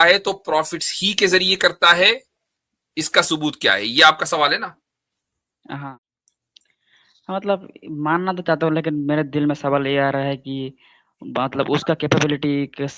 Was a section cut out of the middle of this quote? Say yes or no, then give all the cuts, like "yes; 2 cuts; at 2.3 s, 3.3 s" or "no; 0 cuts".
yes; 1 cut; at 5.9 s